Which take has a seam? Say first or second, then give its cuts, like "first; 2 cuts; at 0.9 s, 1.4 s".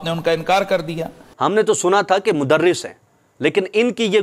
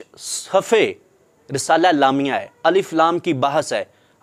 first; 1 cut; at 1.2 s